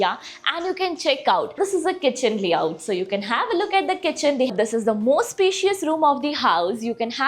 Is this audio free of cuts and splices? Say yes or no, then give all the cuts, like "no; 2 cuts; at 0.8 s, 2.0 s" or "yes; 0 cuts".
no; 2 cuts; at 1.6 s, 4.5 s